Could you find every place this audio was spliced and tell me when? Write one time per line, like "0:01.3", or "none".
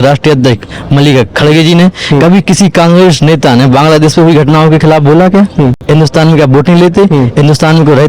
0:05.8

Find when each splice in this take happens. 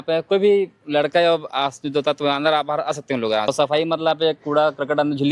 0:03.5

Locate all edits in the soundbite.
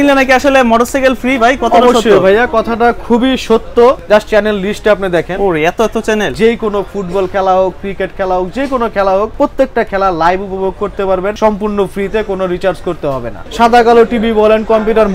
0:04.0
0:06.3
0:09.3
0:11.4
0:13.4

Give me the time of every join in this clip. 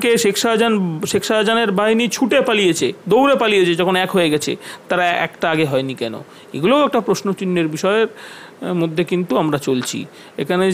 none

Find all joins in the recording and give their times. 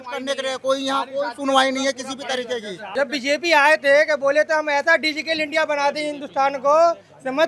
0:02.8

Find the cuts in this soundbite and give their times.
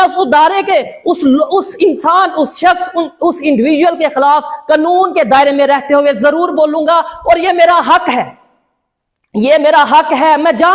none

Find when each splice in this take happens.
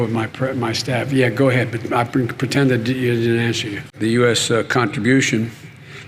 0:03.9

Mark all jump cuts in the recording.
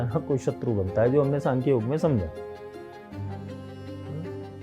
none

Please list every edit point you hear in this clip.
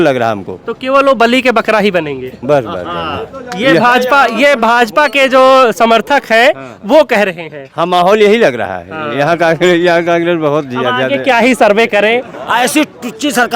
0:12.3

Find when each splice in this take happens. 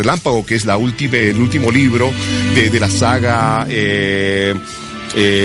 none

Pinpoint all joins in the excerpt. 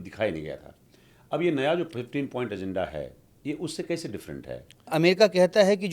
0:04.9

